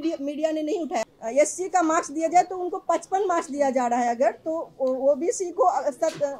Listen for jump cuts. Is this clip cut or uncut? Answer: cut